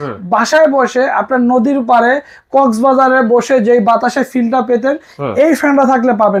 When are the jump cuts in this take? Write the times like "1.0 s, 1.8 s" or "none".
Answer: none